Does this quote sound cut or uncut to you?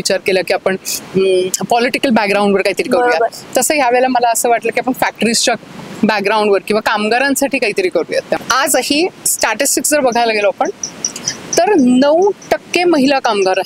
cut